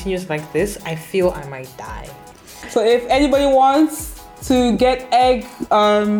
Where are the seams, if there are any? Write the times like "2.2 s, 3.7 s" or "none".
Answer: 2.6 s